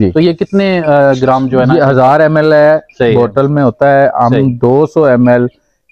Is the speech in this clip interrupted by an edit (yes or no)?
no